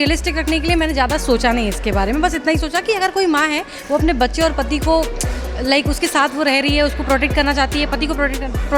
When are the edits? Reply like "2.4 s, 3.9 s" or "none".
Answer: none